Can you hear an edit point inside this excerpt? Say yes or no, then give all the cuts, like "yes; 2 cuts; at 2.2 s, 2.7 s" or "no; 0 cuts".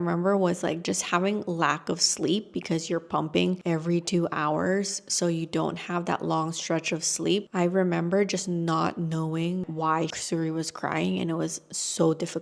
no; 0 cuts